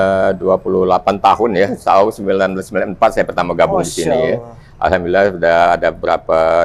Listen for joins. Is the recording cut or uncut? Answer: uncut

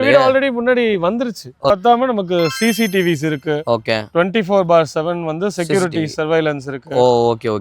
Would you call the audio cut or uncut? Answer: cut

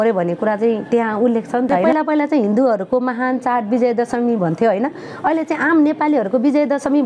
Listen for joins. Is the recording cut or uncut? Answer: cut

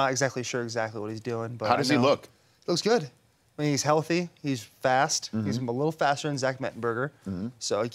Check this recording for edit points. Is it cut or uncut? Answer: uncut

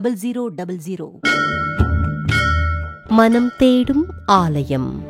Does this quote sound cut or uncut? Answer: cut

